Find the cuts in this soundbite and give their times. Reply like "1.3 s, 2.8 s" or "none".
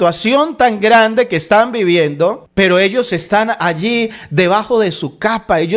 2.4 s